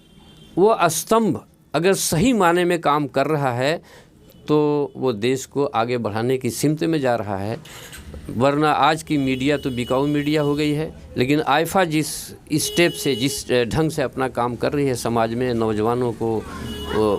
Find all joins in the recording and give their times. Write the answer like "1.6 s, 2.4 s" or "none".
none